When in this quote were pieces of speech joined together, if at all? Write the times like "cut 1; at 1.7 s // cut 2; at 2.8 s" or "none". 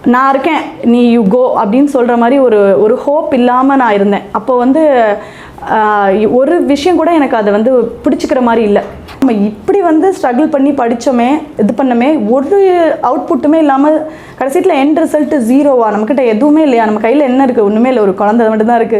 cut 1; at 9.2 s